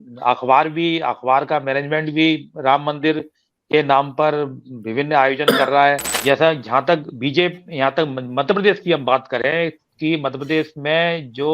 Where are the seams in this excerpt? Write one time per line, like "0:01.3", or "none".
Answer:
0:06.1